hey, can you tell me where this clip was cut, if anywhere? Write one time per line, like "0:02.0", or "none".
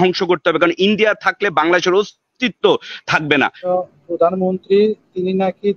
0:03.7

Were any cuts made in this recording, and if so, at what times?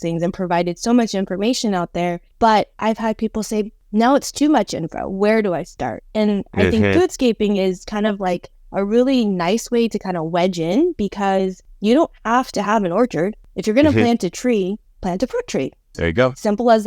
0:02.2
0:03.8
0:11.7
0:15.9

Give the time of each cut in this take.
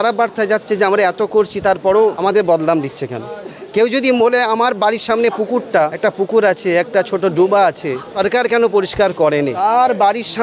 0:02.2
0:05.9
0:08.1
0:09.6

